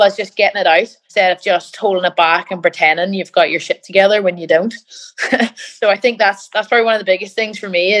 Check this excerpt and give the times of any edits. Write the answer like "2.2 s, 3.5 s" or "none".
1.0 s